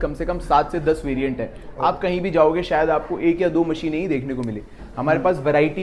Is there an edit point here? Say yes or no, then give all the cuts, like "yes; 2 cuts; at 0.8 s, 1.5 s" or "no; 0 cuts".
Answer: no; 0 cuts